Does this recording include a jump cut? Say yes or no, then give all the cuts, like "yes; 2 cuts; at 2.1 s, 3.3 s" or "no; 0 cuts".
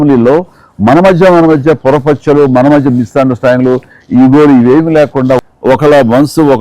yes; 1 cut; at 5.4 s